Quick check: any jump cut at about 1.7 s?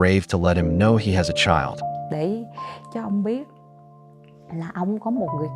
yes; 1 cut; at 1.7 s

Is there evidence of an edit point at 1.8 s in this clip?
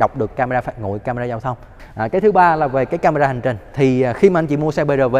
yes; 1 cut; at 1.8 s

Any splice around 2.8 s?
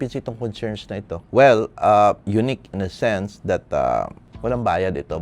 no; 2 cuts; at 1.2 s, 4.2 s

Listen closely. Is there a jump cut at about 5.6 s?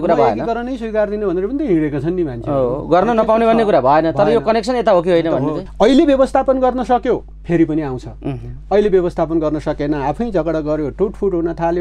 yes; 1 cut; at 5.6 s

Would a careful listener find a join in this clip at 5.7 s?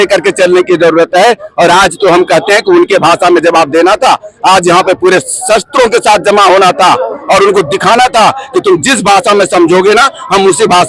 no; 0 cuts

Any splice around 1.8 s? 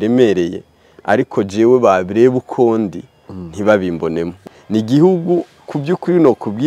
no; 1 cut; at 4.3 s

